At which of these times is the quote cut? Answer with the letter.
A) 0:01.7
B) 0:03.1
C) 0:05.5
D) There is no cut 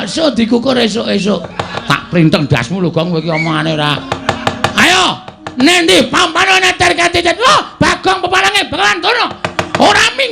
A